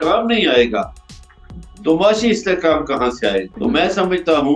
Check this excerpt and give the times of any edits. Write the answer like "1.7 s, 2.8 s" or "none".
3.5 s